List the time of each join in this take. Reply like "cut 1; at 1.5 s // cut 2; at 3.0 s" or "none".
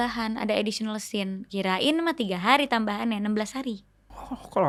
none